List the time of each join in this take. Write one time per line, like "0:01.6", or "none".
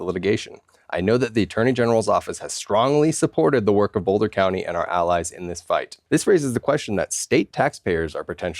0:05.9